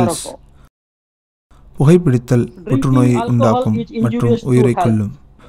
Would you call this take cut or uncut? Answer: uncut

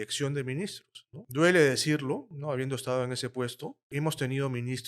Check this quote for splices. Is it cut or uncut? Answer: cut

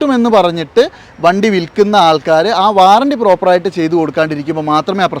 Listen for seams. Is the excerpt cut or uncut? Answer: uncut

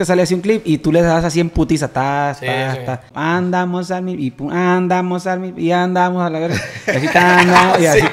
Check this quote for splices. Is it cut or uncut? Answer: cut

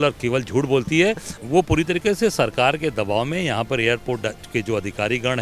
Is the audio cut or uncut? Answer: cut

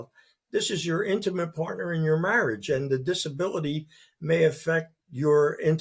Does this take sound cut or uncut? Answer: uncut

